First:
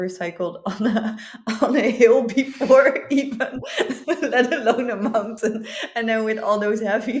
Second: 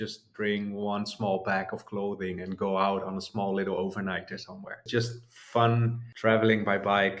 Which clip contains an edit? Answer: second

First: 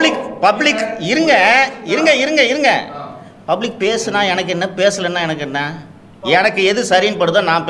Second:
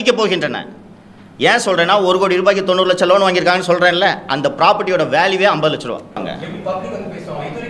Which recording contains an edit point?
second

